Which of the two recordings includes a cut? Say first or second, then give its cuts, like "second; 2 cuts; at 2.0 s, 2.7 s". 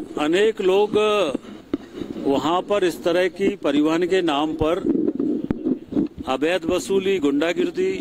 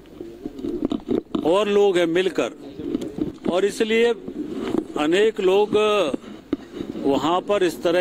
second; 1 cut; at 3.3 s